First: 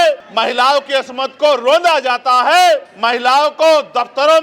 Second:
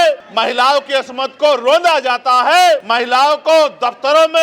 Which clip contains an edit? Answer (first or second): second